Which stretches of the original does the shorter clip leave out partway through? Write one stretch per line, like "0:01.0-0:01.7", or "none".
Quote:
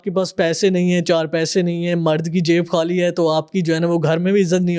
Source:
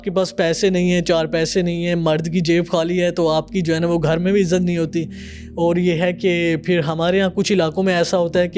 none